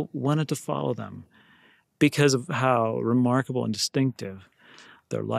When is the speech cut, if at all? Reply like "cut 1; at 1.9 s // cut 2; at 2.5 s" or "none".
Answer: none